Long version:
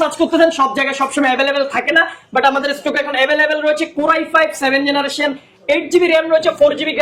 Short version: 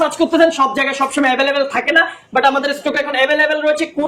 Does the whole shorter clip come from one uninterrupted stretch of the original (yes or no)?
yes